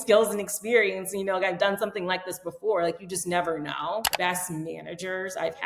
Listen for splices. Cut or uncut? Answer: cut